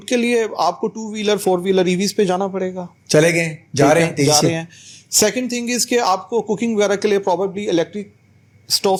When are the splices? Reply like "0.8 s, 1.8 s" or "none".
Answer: none